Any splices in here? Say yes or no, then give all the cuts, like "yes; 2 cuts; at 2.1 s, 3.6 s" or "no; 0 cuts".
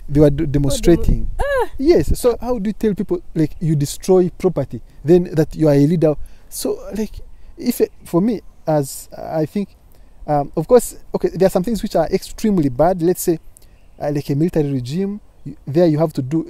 yes; 1 cut; at 2.4 s